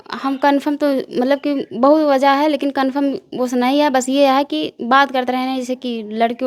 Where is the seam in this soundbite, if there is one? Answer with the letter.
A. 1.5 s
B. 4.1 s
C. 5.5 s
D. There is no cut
D